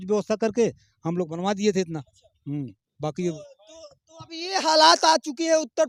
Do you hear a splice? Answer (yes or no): no